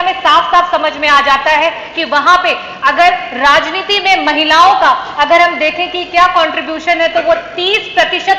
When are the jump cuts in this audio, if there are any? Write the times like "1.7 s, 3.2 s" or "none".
none